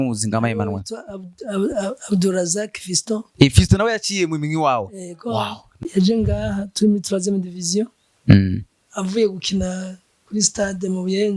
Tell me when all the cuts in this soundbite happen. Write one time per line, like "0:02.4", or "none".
0:05.8